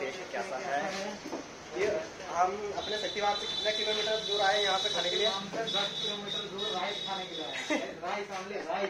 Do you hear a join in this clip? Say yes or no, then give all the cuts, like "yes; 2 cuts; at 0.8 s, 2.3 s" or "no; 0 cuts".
no; 0 cuts